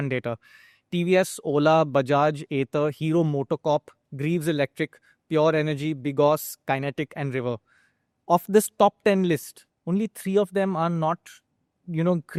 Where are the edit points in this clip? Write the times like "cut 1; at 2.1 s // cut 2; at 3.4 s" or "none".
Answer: none